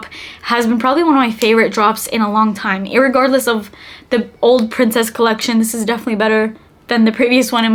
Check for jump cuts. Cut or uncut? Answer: uncut